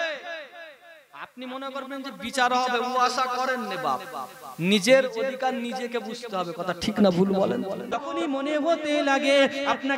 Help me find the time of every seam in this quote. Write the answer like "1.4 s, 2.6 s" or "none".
8.0 s